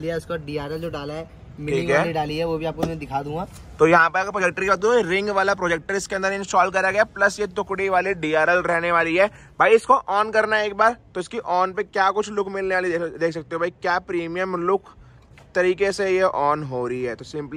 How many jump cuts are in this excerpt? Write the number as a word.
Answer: zero